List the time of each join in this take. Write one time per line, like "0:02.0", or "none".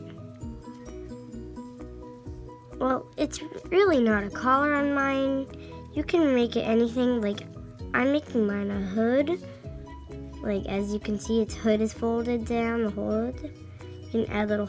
none